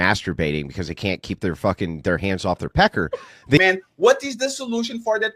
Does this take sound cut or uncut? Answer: cut